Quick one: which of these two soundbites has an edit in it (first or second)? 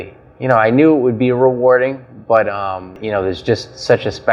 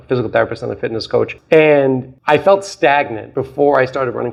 first